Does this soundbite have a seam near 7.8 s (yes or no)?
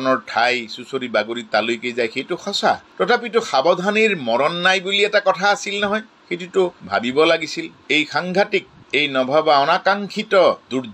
yes